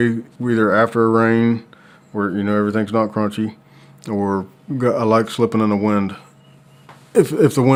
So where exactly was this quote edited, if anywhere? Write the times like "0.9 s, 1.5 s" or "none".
none

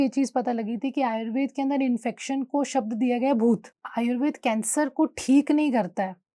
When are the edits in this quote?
3.8 s

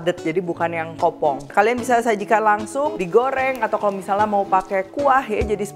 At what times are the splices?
1.4 s, 2.9 s

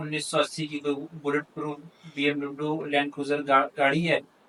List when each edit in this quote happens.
none

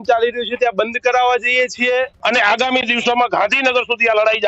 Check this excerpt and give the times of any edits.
2.1 s

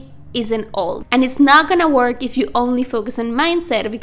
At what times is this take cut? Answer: 1.2 s

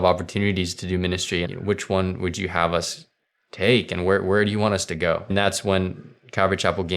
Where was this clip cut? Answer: 1.5 s, 5.3 s

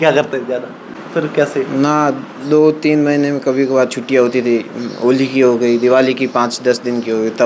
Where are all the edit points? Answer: 1.0 s

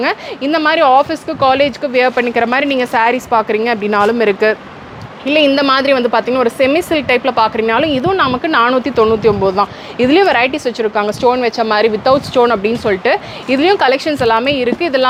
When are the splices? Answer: none

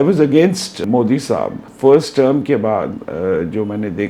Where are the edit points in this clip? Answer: 0.8 s, 1.6 s

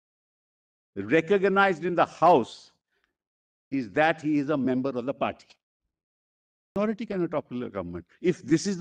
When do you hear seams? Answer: 6.8 s

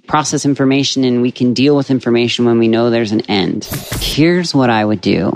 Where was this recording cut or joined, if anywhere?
3.7 s

